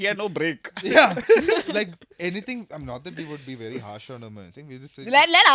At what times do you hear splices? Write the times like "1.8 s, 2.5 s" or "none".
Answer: none